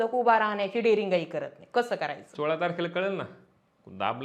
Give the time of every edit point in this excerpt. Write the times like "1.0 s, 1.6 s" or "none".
2.2 s